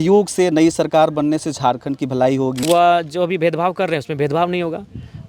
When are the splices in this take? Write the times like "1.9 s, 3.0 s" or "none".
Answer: 2.6 s